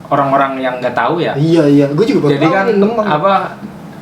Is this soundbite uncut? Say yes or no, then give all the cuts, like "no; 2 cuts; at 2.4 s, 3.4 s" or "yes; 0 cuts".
yes; 0 cuts